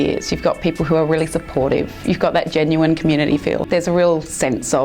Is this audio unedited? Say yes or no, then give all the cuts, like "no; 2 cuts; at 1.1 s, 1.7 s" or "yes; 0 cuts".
yes; 0 cuts